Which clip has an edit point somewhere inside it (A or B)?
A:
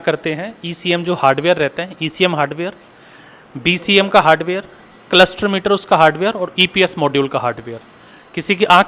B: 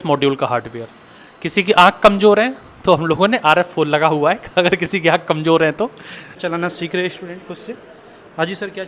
B